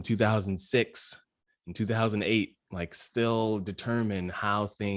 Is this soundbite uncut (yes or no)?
yes